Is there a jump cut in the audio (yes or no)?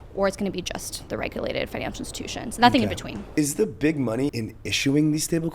yes